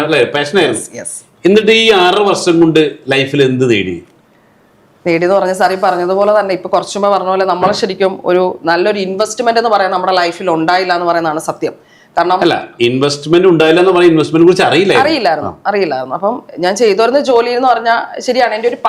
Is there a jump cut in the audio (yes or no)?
no